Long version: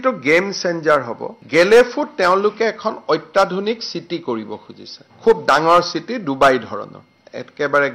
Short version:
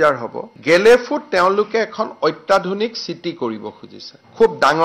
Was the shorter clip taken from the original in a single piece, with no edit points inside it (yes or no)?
yes